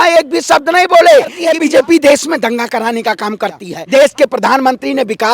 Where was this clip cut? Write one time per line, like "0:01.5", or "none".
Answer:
0:01.4
0:03.7